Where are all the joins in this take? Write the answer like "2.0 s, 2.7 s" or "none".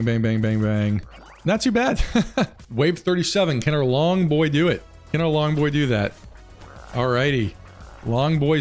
2.6 s